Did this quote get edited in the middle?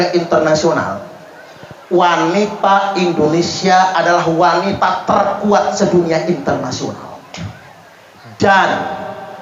no; 0 cuts

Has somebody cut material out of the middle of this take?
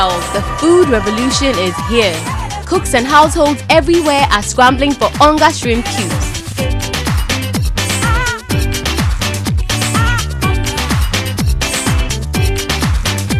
no; 0 cuts

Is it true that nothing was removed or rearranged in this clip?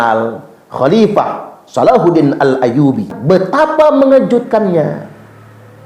no; 1 cut; at 3.1 s

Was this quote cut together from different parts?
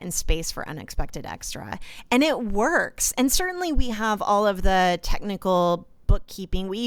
no; 0 cuts

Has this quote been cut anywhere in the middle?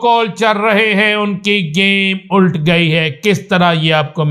no; 0 cuts

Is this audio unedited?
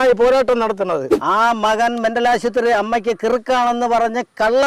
no; 1 cut; at 1.1 s

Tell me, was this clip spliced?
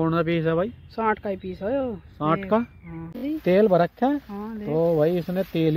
yes; 1 cut; at 3.2 s

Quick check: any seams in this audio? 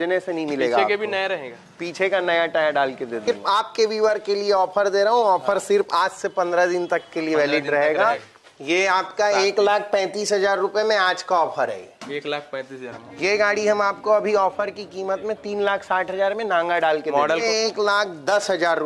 yes; 4 cuts; at 3.2 s, 8.3 s, 13.0 s, 17.4 s

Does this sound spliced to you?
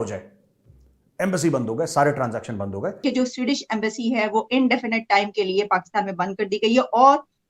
yes; 1 cut; at 3.0 s

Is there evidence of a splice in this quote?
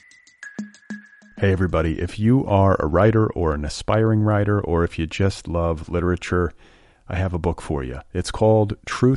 yes; 1 cut; at 0.9 s

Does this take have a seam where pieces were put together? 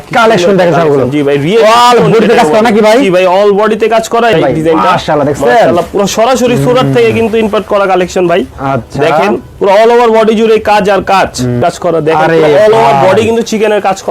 yes; 2 cuts; at 4.3 s, 11.6 s

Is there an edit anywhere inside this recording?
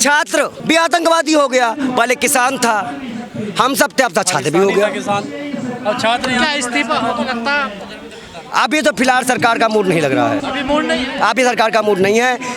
no; 0 cuts

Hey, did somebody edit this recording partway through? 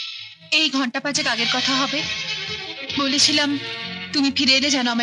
no; 0 cuts

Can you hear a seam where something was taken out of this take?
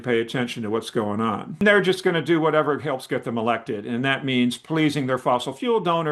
yes; 1 cut; at 1.6 s

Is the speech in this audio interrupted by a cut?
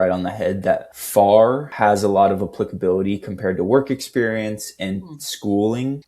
yes; 2 cuts; at 0.9 s, 1.7 s

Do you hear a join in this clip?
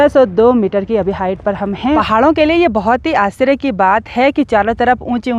yes; 1 cut; at 2.0 s

